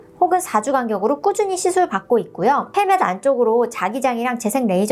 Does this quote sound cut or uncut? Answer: cut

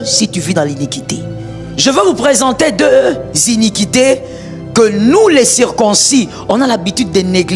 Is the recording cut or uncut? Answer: cut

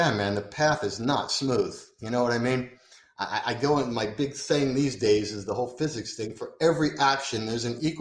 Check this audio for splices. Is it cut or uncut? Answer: uncut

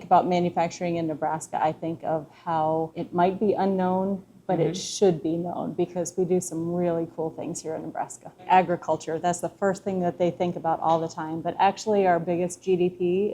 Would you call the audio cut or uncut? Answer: cut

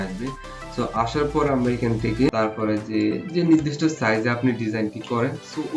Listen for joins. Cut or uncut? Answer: cut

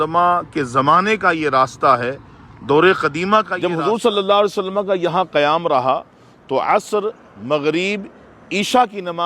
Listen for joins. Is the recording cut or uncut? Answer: cut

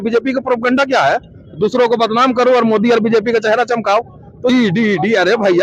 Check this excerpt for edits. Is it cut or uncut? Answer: cut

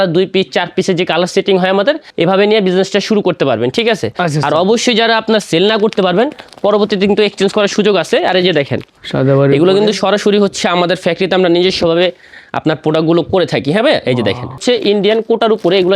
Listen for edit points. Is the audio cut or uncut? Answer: cut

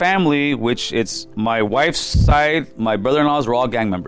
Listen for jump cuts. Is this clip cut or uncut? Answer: cut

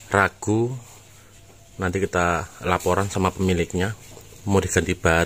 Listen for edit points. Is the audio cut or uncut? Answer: uncut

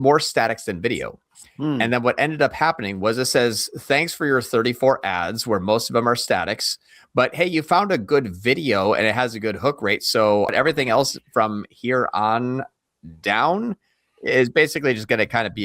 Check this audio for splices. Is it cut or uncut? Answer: cut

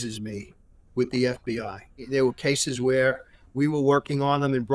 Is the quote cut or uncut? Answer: cut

